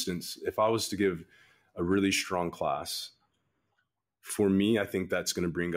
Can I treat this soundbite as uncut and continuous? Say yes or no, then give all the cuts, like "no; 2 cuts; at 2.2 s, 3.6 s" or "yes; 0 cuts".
yes; 0 cuts